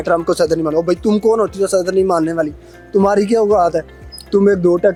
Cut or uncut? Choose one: uncut